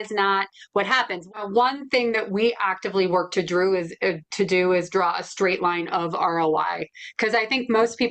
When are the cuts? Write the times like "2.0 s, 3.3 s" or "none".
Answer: 1.3 s